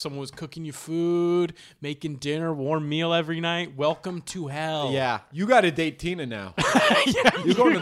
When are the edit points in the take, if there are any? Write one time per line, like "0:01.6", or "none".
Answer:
0:05.3